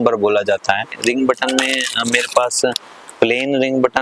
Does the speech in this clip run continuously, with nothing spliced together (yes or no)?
no